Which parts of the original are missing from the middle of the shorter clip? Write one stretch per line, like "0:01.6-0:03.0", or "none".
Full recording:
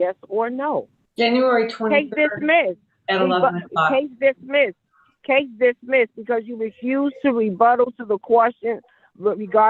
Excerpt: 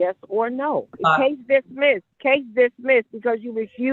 0:00.9-0:03.6
0:04.8-0:05.1

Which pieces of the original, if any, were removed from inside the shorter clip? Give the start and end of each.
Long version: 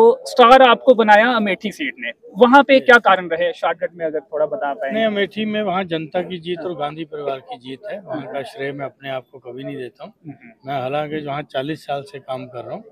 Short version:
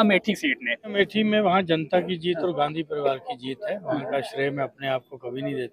0:02.3-0:05.2

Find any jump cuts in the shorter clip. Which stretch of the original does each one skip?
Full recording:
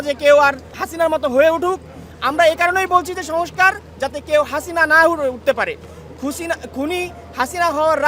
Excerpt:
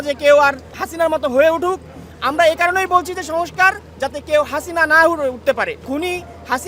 0:05.8-0:06.7

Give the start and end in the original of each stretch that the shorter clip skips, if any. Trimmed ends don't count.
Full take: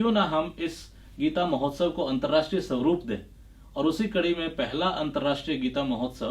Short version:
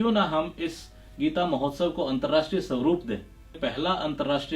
0:03.5-0:04.5

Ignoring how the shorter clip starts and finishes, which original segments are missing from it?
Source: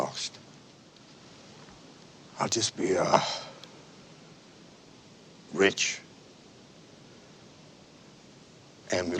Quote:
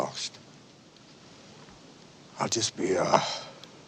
none

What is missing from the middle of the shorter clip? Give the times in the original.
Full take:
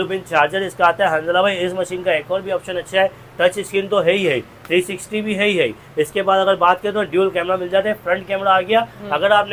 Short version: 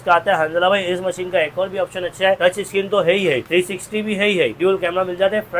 0:03.1-0:03.4
0:04.4-0:04.6
0:05.8-0:07.1

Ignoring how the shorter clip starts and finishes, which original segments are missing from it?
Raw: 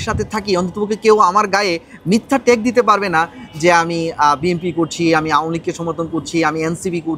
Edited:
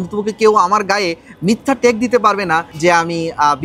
0:03.3-0:03.5

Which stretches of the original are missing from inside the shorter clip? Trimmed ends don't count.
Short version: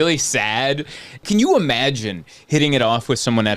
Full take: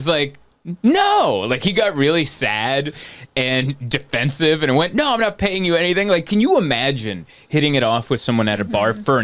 0:03.3-0:06.2

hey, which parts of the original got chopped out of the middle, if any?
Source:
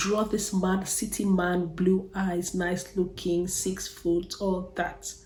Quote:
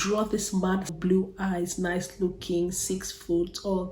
0:00.9-0:01.7

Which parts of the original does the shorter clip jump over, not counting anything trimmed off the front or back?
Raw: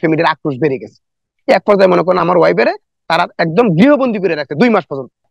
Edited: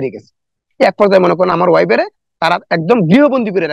none

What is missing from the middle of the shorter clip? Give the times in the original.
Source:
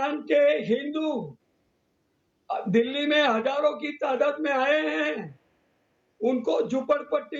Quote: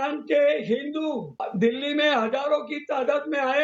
0:01.4-0:02.5

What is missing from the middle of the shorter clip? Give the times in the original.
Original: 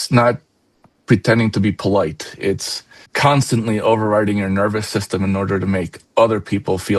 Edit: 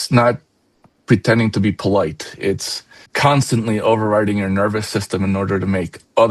none

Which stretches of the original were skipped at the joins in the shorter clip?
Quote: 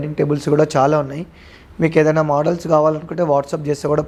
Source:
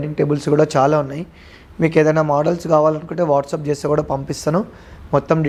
none

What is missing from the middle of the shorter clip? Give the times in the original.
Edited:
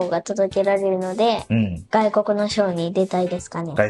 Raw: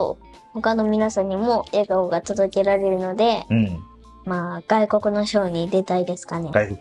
0:03.8-0:04.6

